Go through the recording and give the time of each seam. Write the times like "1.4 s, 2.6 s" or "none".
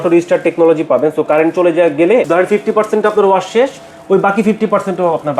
2.3 s